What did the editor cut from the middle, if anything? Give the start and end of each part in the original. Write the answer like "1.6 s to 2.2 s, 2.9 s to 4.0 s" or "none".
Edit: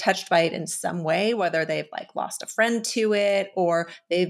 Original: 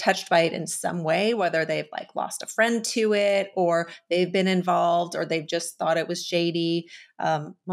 none